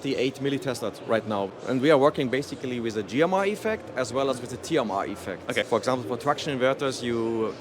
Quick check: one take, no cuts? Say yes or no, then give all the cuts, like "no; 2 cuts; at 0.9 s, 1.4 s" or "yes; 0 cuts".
no; 2 cuts; at 1.5 s, 5.7 s